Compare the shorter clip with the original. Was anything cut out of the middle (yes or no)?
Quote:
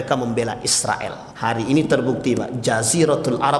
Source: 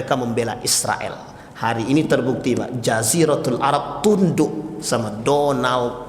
yes